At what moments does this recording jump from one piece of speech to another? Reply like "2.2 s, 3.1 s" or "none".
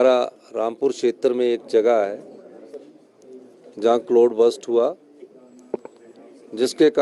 none